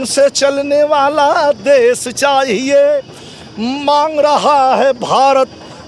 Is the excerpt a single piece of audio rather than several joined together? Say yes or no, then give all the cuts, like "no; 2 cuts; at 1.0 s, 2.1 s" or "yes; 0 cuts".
yes; 0 cuts